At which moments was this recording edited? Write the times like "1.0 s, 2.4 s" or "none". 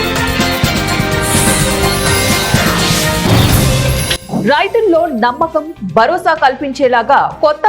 4.1 s